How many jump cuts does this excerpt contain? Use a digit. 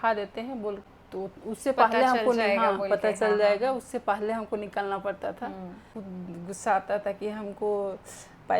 2